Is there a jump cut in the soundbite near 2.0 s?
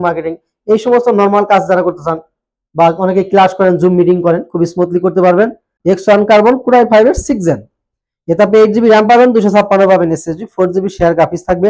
no; 1 cut; at 5.7 s

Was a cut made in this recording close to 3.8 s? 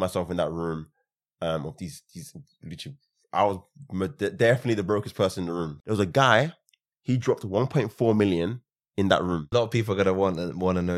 no; 2 cuts; at 5.7 s, 9.5 s

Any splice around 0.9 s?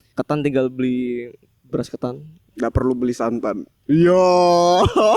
no; 2 cuts; at 2.5 s, 3.7 s

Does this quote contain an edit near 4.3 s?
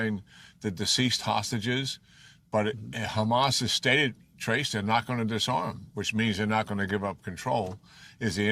no; 0 cuts

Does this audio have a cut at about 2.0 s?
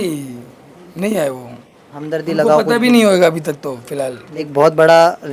no; 1 cut; at 4.3 s

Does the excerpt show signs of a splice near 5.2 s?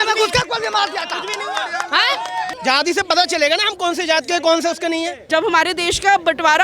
yes; 2 cuts; at 2.5 s, 5.2 s

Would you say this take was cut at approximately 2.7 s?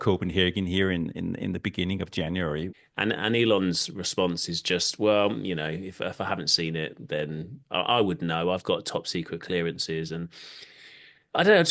yes; 1 cut; at 2.7 s

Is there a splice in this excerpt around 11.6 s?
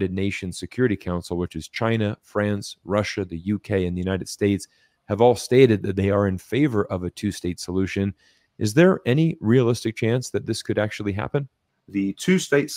yes; 1 cut; at 11.6 s

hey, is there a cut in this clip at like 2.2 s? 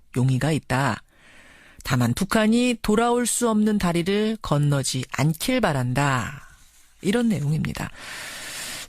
yes; 1 cut; at 2.2 s

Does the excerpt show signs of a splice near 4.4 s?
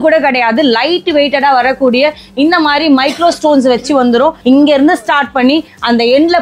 yes; 1 cut; at 4.4 s

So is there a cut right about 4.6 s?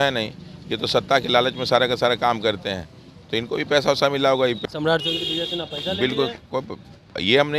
yes; 1 cut; at 4.6 s

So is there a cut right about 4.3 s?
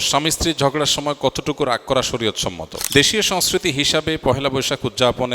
no; 1 cut; at 2.8 s

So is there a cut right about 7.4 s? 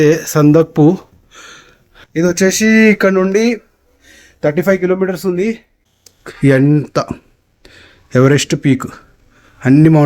no; 1 cut; at 5.7 s

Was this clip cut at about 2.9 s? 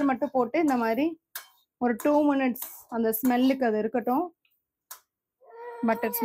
no; 0 cuts

